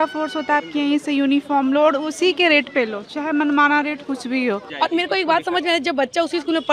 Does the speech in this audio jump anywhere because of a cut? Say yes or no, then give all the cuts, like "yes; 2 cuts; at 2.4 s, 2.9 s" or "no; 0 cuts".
yes; 1 cut; at 4.7 s